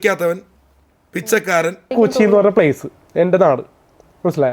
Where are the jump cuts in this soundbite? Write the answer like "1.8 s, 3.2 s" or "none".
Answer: 1.9 s

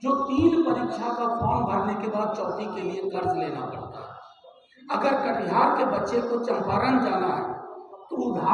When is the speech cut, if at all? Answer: none

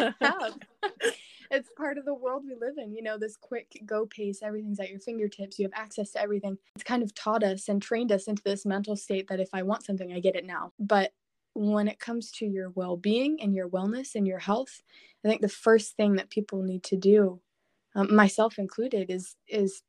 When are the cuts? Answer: 6.7 s, 10.7 s

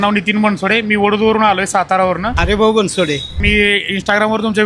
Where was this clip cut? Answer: 2.3 s, 3.3 s

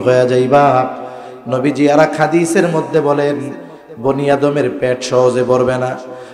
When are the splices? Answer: none

